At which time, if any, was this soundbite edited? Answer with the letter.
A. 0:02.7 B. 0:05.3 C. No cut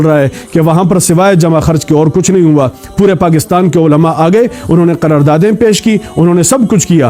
C